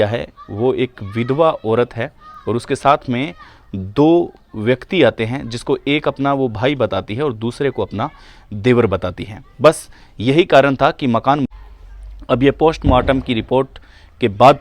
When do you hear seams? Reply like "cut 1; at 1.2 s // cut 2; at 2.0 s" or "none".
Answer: cut 1; at 11.4 s